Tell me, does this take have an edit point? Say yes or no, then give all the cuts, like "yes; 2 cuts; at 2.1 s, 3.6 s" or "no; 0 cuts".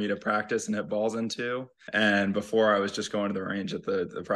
yes; 1 cut; at 1.8 s